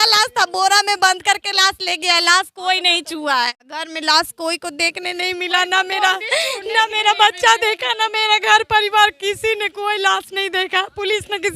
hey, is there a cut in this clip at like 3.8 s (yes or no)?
yes